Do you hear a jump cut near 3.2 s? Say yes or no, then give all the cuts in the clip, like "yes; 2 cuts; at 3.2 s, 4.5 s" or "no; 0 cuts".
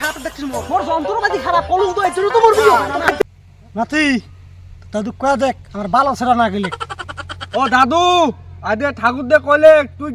yes; 1 cut; at 3.2 s